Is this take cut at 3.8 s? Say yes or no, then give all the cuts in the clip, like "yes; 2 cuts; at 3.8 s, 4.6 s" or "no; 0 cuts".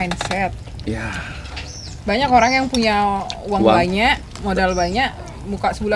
no; 1 cut; at 1.9 s